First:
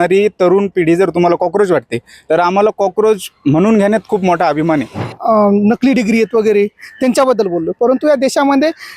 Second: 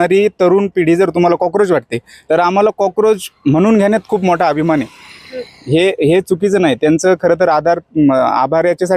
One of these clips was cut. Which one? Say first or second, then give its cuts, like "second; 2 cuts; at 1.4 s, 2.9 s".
first; 1 cut; at 5.1 s